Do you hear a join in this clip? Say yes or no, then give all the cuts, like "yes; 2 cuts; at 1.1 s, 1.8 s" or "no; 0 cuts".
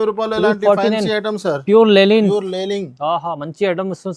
no; 0 cuts